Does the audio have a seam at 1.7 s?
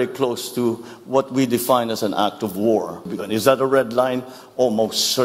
no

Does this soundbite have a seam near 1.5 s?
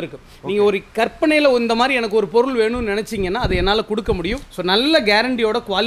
no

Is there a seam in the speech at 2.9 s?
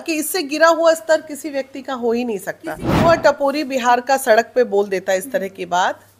yes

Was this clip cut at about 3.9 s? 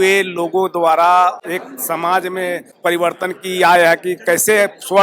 no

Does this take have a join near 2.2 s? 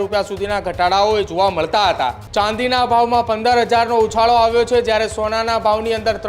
yes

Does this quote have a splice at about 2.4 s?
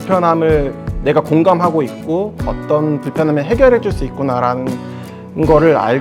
no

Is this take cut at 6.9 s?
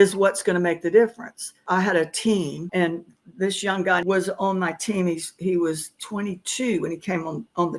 no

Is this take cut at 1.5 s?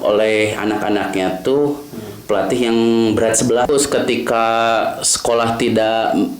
no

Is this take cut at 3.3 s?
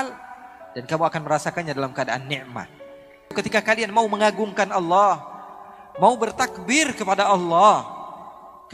yes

